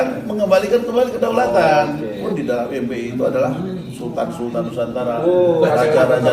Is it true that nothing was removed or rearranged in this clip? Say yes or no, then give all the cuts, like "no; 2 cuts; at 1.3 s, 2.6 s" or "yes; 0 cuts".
no; 1 cut; at 2.2 s